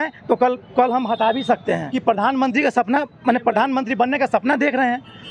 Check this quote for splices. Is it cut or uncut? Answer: cut